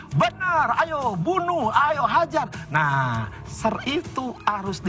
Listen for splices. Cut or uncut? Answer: uncut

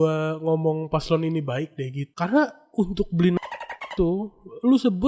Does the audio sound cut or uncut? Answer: cut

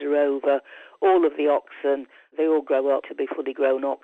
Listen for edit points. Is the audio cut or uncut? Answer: cut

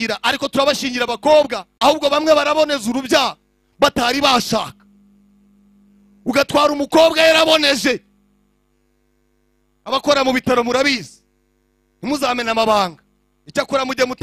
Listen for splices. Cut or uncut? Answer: cut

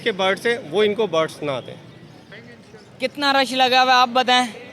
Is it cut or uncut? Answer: cut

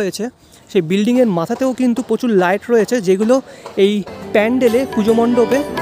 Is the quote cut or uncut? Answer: uncut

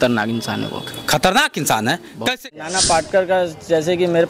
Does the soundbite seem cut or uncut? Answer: cut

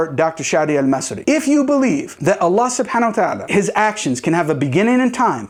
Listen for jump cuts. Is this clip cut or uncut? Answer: uncut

